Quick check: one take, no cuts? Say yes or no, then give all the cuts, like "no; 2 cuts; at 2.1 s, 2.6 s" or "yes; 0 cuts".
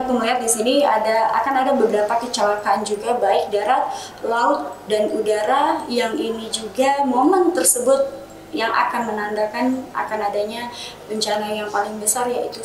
yes; 0 cuts